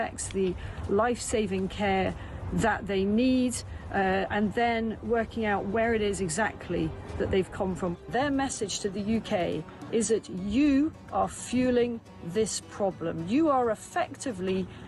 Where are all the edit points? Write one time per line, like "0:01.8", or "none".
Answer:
none